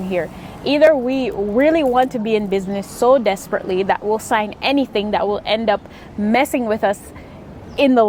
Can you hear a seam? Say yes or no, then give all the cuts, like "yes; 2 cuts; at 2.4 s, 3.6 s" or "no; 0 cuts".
no; 0 cuts